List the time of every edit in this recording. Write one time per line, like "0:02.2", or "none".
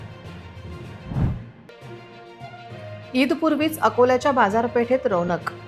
0:01.2